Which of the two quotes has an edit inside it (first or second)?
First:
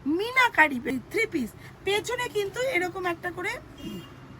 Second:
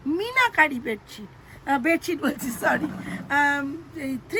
first